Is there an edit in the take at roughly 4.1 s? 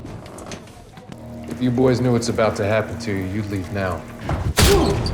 no; 1 cut; at 1.2 s

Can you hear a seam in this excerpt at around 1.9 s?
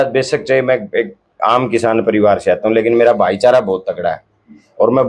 no; 0 cuts

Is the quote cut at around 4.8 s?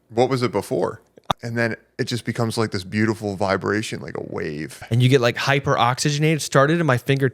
yes; 2 cuts; at 1.2 s, 4.8 s

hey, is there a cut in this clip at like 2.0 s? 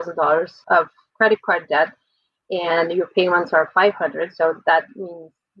no; 0 cuts

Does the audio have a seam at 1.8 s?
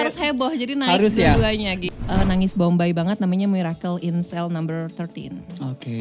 yes; 1 cut; at 1.8 s

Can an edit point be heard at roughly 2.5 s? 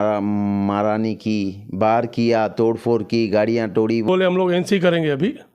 no; 1 cut; at 4.1 s

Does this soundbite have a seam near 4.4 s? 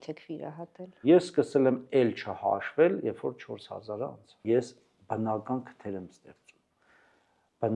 yes; 2 cuts; at 1.0 s, 4.4 s

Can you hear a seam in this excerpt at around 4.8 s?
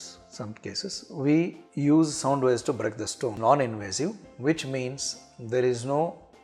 no; 1 cut; at 3.4 s

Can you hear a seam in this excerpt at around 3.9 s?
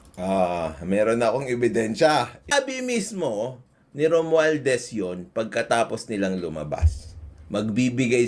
no; 1 cut; at 2.5 s

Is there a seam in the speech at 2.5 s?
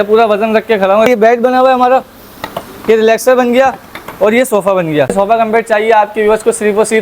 no; 2 cuts; at 1.1 s, 5.1 s

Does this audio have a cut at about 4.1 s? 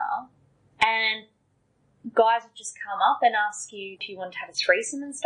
yes; 1 cut; at 4.1 s

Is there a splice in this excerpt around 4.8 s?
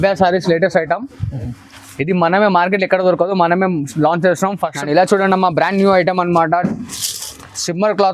yes; 1 cut; at 4.8 s

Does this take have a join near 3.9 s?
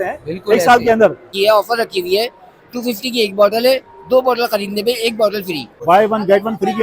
no; 2 cuts; at 1.3 s, 5.7 s

